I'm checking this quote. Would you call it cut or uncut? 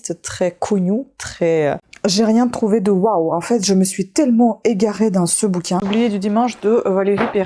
cut